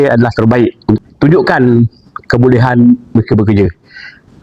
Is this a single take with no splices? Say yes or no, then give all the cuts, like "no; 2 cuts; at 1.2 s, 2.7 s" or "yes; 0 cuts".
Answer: no; 1 cut; at 1.0 s